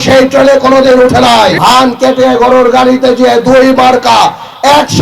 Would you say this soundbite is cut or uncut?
cut